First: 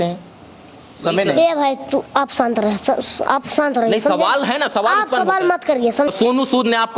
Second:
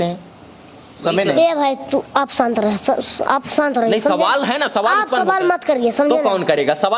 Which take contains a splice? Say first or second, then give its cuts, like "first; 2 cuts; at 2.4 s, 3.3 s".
first; 1 cut; at 6.1 s